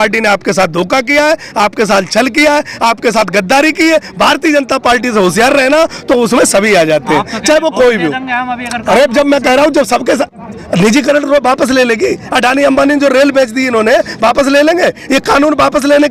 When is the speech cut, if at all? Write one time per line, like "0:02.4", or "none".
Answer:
none